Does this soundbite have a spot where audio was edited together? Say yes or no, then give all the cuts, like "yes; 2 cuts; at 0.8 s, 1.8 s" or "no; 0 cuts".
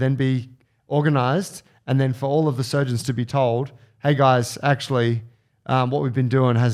no; 0 cuts